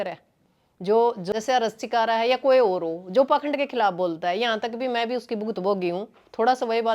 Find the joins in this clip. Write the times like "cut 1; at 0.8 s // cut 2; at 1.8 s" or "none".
cut 1; at 1.3 s